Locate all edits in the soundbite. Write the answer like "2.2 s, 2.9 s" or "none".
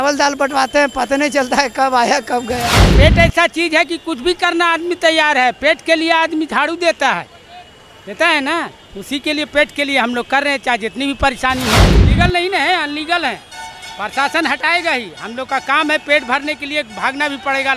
2.9 s, 12.0 s

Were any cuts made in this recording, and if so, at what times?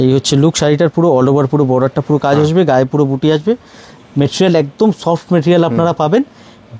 none

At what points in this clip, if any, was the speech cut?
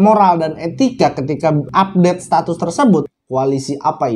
3.1 s

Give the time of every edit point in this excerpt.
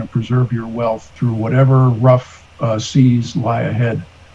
1.1 s

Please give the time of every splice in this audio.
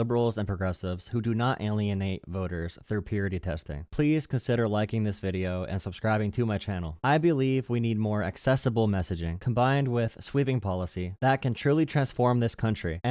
none

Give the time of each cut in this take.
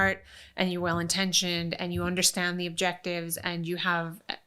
none

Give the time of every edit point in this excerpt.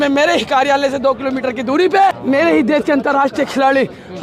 2.2 s

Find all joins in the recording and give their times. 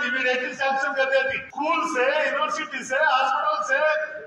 1.4 s

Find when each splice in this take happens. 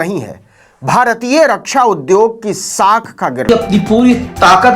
3.5 s

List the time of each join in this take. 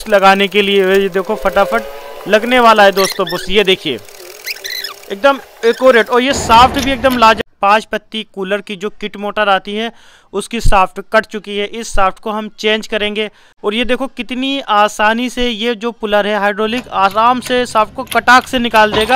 7.4 s, 13.4 s

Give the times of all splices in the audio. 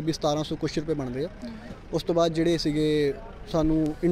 none

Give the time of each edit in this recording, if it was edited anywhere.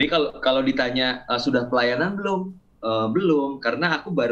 none

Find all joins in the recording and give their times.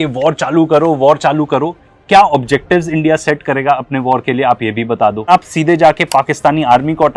5.3 s

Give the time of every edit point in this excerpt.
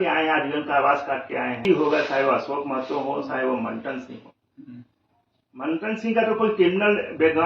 1.6 s

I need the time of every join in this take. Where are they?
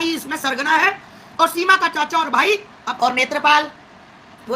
2.8 s

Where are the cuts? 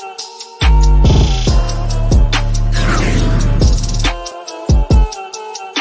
4.3 s

